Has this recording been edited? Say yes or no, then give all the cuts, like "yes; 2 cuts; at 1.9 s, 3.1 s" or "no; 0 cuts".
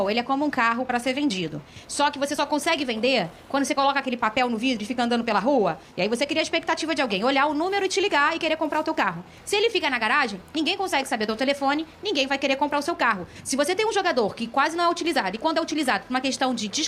no; 0 cuts